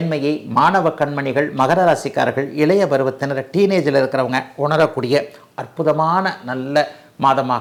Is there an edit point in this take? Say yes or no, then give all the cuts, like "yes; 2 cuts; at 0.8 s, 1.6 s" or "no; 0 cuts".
no; 0 cuts